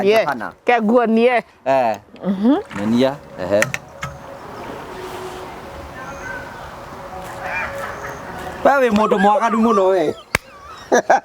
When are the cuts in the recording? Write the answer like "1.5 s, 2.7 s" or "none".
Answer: 1.5 s